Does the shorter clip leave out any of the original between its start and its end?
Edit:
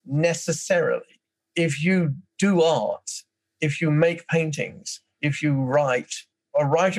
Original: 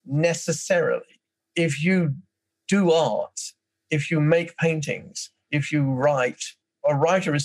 yes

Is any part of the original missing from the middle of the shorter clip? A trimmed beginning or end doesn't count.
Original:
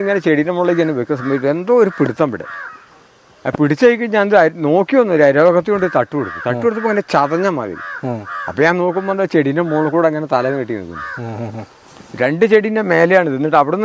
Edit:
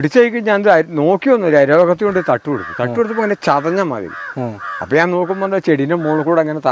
no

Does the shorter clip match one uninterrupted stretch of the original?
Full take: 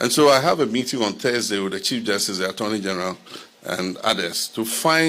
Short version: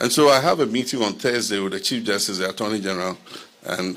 yes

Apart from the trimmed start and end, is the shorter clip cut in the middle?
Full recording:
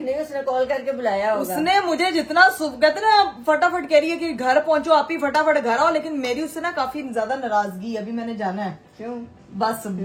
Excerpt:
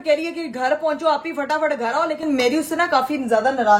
no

